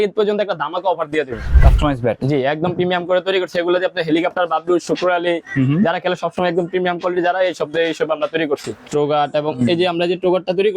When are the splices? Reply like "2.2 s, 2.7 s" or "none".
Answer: 1.6 s, 8.8 s